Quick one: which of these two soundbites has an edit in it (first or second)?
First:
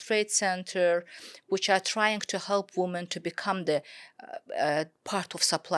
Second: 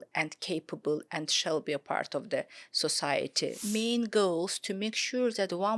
second